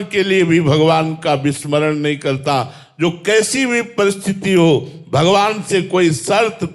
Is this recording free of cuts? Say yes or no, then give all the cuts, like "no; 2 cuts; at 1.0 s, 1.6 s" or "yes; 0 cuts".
yes; 0 cuts